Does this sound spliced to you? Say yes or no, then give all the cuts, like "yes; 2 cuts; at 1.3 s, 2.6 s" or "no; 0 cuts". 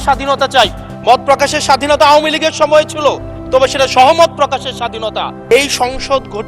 yes; 2 cuts; at 0.9 s, 5.4 s